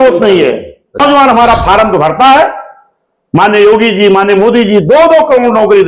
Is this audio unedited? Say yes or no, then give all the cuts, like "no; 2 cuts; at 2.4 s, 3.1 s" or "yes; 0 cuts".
no; 1 cut; at 1.0 s